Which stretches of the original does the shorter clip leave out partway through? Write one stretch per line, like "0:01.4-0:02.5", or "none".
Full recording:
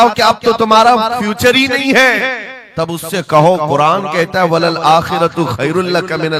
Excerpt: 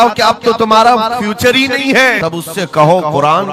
0:02.2-0:02.7